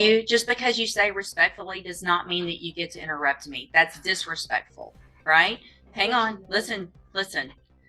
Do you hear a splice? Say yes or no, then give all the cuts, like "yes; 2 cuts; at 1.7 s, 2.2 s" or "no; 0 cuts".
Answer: no; 0 cuts